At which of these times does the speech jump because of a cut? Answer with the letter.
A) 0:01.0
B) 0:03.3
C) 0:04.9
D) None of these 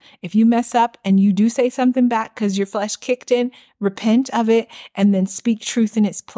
D